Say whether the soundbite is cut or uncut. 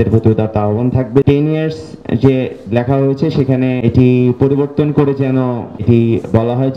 cut